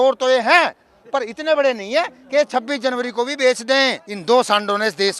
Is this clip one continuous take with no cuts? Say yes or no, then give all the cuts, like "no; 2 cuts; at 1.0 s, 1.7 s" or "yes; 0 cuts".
no; 1 cut; at 4.1 s